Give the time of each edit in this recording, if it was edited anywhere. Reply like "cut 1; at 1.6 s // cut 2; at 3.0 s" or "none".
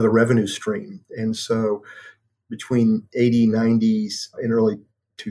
cut 1; at 4.3 s